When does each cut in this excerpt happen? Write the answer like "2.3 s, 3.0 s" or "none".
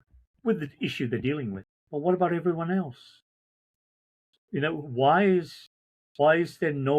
1.7 s